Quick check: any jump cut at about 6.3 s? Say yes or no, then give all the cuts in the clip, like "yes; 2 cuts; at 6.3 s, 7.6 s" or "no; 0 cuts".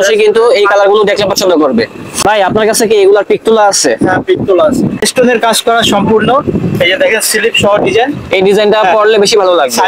no; 2 cuts; at 2.0 s, 5.1 s